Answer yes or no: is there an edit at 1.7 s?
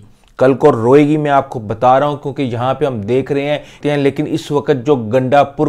no